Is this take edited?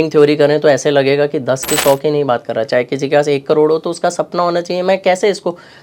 no; 0 cuts

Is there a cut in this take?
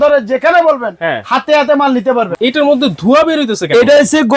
yes; 1 cut; at 2.3 s

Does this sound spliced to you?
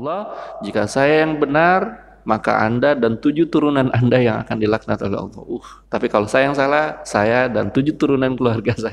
yes; 1 cut; at 5.7 s

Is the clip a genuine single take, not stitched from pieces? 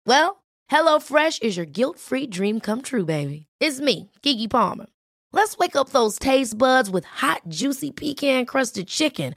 yes; 0 cuts

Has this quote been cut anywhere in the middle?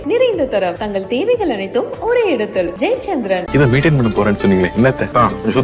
no; 0 cuts

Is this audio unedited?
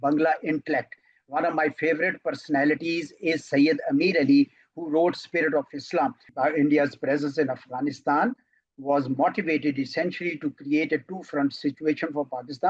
no; 1 cut; at 6.2 s

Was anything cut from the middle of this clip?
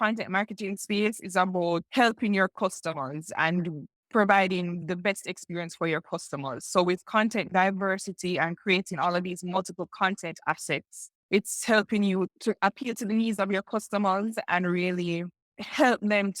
yes; 1 cut; at 1.9 s

